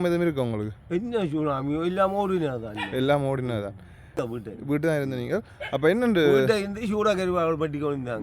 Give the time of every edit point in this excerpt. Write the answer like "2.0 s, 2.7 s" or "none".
4.2 s

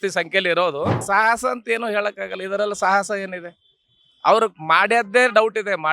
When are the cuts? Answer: 1.0 s

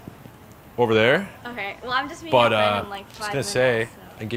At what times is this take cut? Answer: none

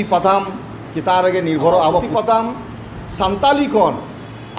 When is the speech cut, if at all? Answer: 2.1 s

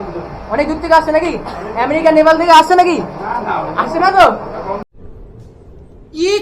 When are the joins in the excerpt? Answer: 3.2 s, 4.7 s

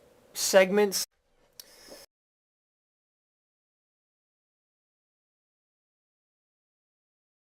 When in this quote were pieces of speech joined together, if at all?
none

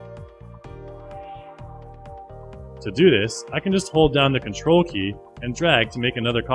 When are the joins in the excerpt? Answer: 3.2 s

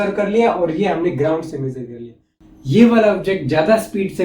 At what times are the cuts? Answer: 2.3 s

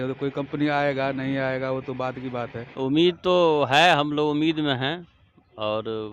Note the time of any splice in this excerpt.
2.6 s

